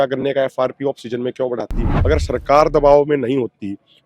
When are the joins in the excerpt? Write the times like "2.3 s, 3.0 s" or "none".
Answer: 1.8 s